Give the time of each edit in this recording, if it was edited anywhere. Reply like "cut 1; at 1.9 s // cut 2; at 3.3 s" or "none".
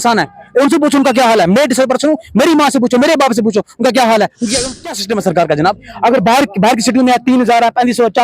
cut 1; at 4.6 s